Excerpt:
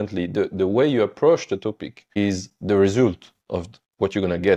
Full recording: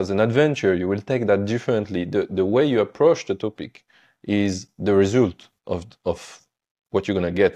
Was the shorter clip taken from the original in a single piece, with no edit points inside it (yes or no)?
no